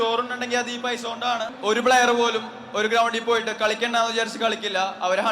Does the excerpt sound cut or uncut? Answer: cut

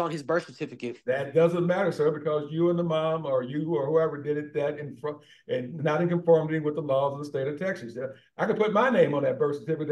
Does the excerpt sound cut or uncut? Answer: uncut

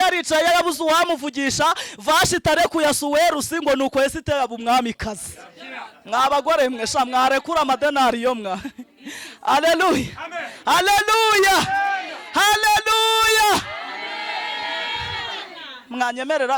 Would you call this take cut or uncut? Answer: uncut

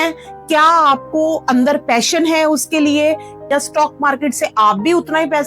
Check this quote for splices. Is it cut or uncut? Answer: uncut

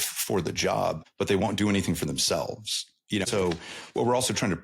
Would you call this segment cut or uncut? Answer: cut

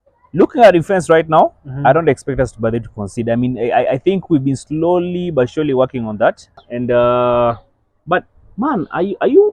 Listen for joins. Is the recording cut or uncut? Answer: cut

